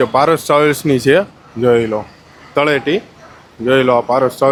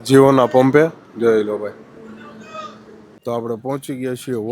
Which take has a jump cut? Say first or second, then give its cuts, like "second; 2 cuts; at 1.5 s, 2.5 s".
second; 1 cut; at 3.2 s